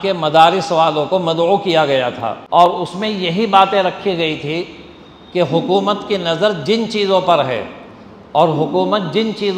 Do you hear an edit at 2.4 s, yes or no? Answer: yes